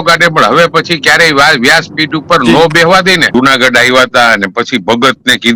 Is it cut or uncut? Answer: cut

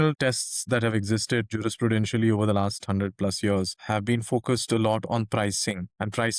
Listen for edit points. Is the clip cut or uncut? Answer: uncut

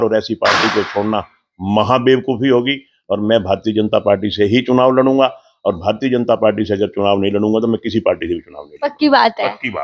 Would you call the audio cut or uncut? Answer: uncut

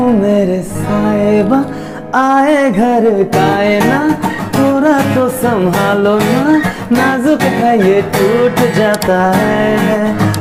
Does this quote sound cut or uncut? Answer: uncut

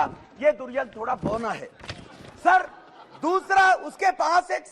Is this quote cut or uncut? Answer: uncut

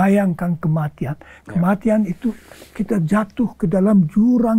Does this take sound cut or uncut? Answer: uncut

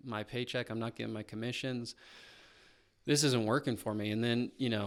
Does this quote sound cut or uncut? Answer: uncut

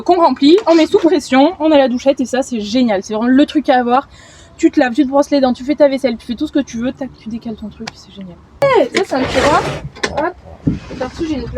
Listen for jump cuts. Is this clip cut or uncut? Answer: cut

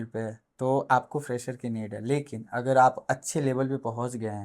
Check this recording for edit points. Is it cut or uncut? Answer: uncut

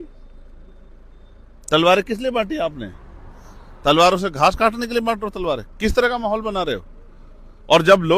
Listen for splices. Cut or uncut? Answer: uncut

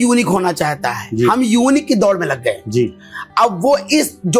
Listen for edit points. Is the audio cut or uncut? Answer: uncut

